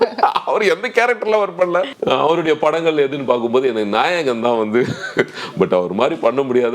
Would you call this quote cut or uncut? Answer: cut